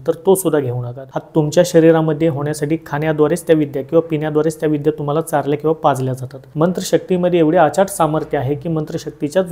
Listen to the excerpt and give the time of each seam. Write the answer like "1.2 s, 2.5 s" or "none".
1.1 s, 6.5 s